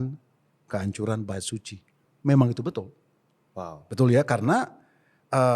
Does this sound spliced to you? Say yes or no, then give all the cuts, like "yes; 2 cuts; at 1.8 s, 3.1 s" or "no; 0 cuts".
no; 0 cuts